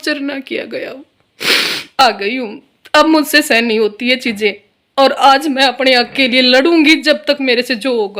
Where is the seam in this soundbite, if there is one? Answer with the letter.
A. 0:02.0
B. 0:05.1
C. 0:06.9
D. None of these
A